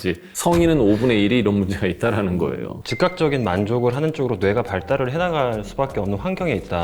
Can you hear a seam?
no; 0 cuts

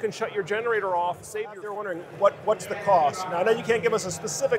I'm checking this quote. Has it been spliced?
yes; 1 cut; at 1.8 s

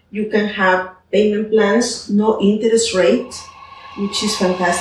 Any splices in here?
no; 0 cuts

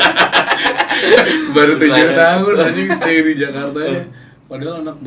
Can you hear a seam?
no; 0 cuts

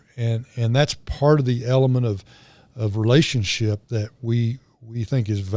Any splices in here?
no; 0 cuts

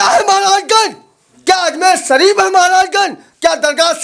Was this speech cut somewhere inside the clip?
no; 0 cuts

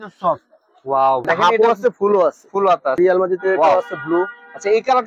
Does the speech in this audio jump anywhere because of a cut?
yes; 2 cuts; at 1.2 s, 3.0 s

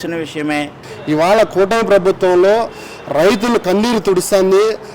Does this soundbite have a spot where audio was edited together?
yes; 1 cut; at 0.9 s

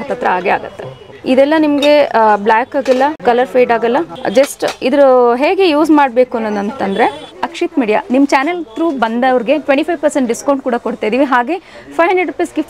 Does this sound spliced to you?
yes; 4 cuts; at 1.1 s, 3.2 s, 4.2 s, 7.3 s

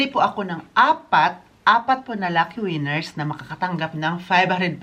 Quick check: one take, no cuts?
yes; 0 cuts

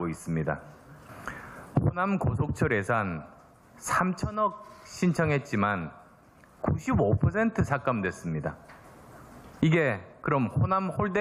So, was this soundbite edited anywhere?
no; 0 cuts

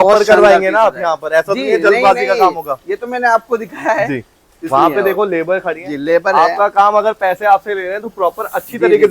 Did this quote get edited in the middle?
no; 0 cuts

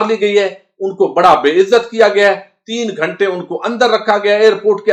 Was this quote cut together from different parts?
no; 0 cuts

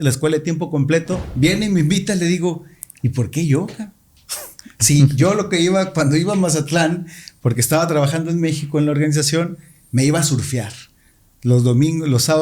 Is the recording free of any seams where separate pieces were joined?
no; 1 cut; at 1.2 s

